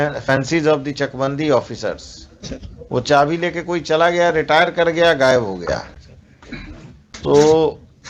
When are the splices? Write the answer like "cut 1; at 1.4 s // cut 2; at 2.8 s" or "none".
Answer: cut 1; at 7.1 s